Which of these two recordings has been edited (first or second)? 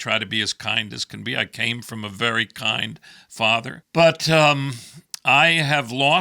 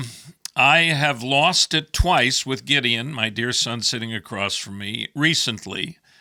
first